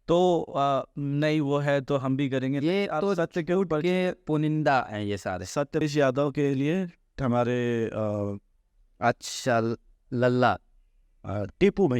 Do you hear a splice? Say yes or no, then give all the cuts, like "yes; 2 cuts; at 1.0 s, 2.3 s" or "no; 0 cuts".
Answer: yes; 1 cut; at 5.8 s